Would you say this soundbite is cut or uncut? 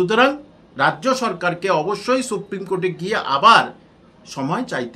uncut